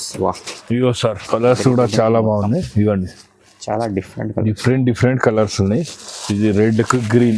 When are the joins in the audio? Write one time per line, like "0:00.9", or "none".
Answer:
0:01.2